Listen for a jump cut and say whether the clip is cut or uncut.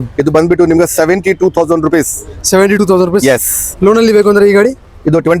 uncut